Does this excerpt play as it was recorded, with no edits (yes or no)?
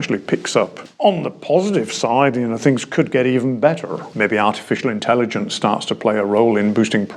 no